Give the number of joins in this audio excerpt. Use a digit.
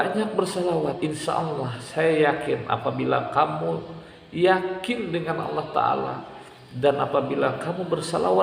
1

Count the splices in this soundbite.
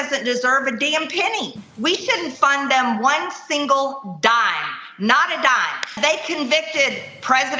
1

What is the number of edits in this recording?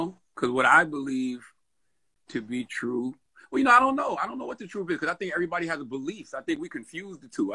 1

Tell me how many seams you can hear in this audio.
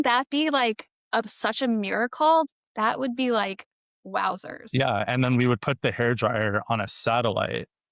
1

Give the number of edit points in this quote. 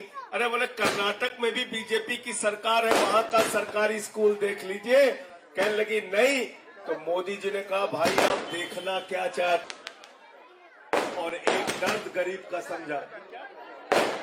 1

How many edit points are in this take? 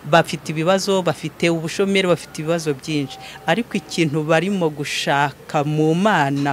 0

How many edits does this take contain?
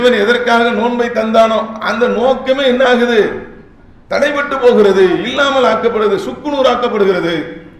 0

